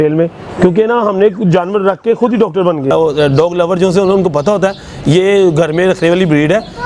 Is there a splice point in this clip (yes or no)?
yes